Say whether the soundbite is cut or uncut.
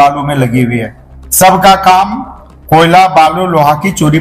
uncut